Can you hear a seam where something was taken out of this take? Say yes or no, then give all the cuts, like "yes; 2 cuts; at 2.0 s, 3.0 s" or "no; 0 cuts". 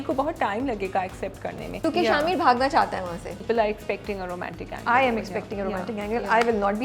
yes; 2 cuts; at 1.8 s, 3.4 s